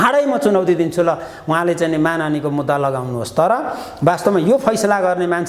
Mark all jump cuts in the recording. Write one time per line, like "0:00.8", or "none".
none